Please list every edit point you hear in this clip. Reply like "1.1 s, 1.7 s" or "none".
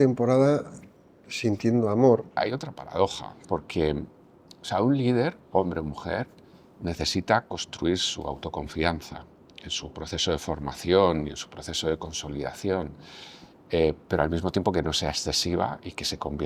2.4 s